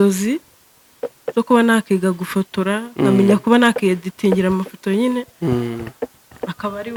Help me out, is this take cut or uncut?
uncut